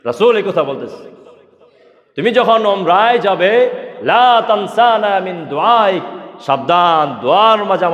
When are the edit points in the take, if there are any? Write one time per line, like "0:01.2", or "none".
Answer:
none